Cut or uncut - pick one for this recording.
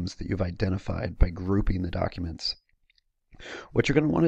cut